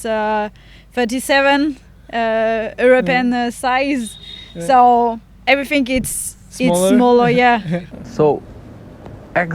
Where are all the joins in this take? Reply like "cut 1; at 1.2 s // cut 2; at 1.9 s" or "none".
cut 1; at 7.8 s